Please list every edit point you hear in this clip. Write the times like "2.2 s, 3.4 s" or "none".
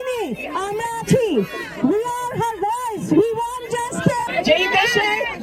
4.3 s

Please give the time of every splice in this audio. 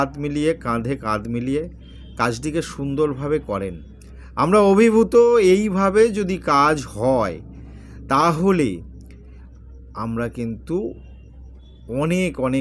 none

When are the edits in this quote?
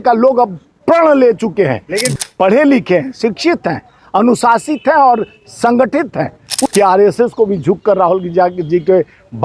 2.1 s, 6.5 s

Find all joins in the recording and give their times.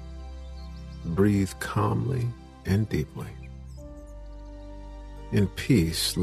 0.9 s, 3.3 s, 4.8 s

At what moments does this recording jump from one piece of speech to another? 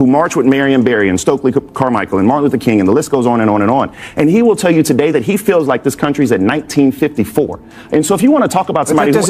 none

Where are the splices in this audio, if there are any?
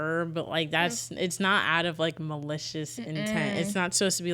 none

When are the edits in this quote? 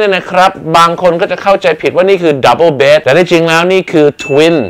none

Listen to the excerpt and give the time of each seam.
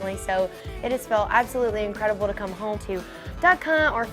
2.8 s

